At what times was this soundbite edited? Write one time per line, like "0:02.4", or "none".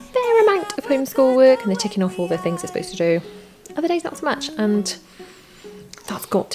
none